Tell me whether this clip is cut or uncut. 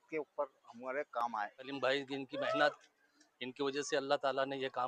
cut